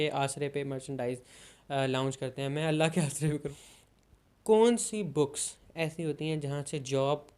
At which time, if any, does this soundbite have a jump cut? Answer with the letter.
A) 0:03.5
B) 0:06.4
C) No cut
A